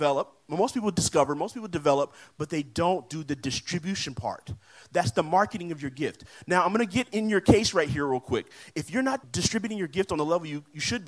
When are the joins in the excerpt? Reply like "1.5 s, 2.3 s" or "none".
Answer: 9.3 s